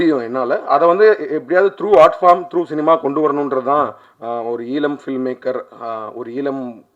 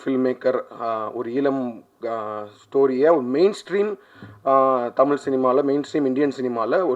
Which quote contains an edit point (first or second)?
first